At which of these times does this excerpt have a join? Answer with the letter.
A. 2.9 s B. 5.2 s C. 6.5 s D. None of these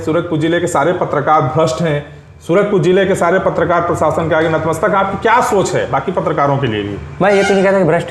D